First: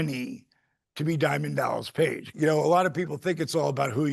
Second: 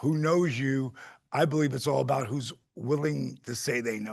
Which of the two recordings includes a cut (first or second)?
first